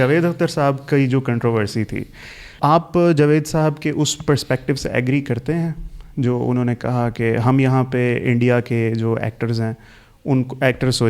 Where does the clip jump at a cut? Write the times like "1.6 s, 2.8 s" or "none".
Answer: 2.5 s

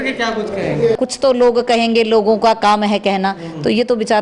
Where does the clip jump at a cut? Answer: 1.0 s

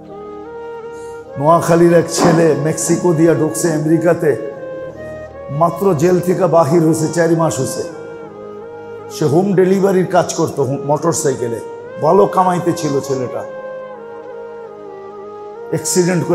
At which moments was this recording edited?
13.8 s, 15.4 s

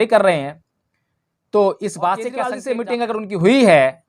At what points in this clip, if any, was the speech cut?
2.7 s

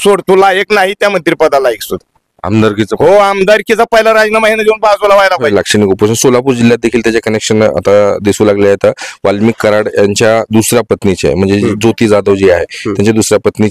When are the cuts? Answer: 5.5 s

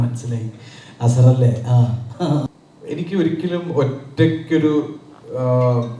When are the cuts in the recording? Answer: 2.5 s

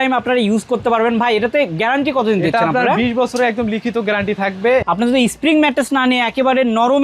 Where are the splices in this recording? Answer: 4.8 s

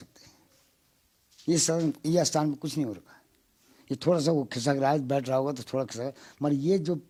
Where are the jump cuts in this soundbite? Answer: none

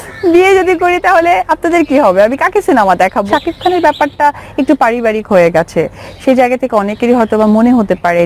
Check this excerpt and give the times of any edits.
3.3 s

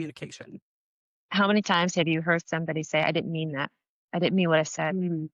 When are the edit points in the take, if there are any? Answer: 1.3 s

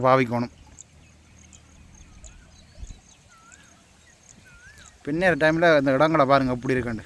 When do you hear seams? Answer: none

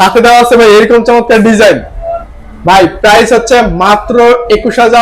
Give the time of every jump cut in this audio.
none

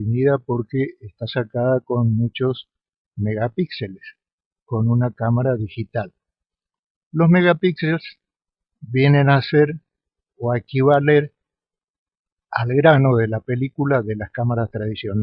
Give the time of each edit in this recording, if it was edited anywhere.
5.4 s

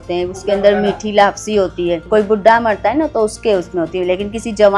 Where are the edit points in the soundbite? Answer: 2.0 s

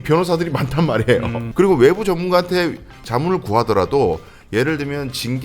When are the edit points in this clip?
1.4 s

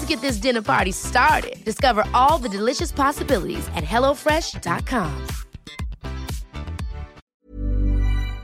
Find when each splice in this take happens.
7.2 s

